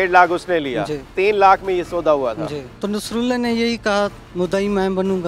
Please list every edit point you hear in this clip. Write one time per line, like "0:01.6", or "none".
0:01.0
0:02.7
0:04.2